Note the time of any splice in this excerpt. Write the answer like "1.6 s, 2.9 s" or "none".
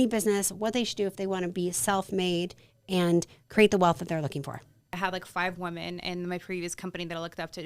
5.0 s